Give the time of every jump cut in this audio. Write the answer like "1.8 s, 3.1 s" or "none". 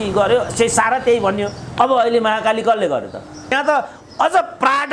3.5 s